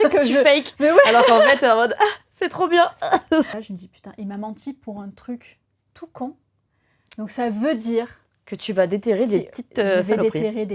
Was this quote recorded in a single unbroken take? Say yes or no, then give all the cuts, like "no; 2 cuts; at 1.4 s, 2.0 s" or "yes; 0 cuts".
no; 1 cut; at 3.5 s